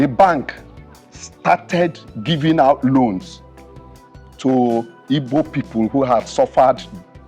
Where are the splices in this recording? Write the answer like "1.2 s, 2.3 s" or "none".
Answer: none